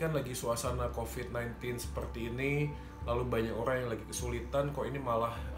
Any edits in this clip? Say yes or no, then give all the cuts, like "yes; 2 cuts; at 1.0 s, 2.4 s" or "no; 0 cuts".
no; 0 cuts